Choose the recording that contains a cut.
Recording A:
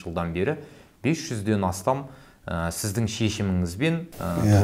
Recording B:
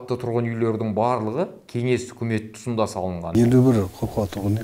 B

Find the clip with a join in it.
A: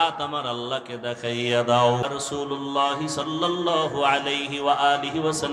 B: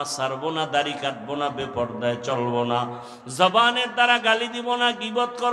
A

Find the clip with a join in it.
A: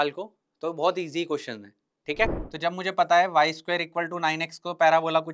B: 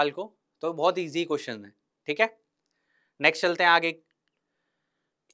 A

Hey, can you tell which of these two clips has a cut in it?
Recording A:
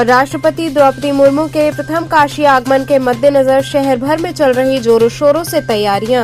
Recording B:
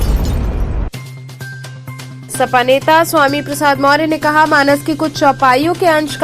B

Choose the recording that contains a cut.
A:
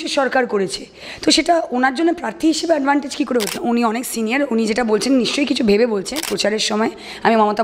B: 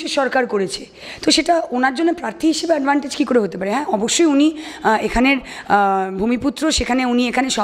A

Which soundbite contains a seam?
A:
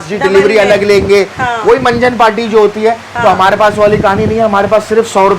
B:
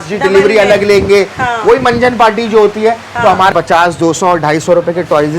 B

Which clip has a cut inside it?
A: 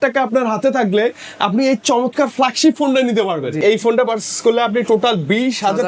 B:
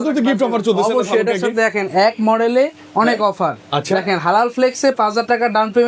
A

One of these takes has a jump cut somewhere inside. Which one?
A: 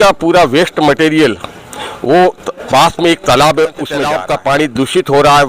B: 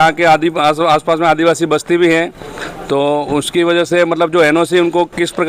A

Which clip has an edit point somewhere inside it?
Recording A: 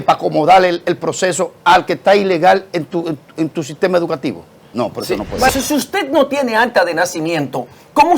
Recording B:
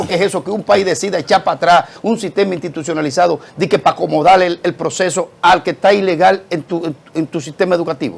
A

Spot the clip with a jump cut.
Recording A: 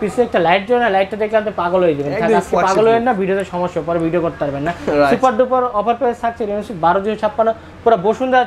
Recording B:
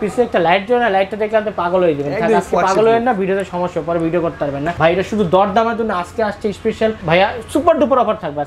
B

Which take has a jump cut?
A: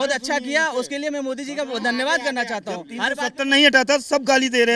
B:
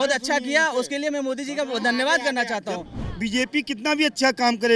B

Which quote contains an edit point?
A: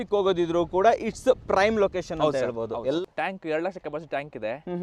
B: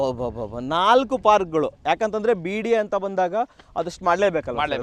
A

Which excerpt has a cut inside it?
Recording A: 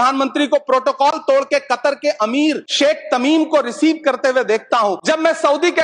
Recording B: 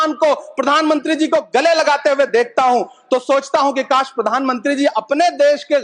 A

